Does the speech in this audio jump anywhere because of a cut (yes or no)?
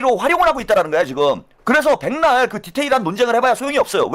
yes